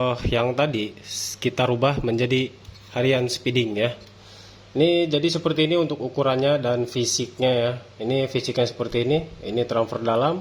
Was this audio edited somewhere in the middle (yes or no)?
no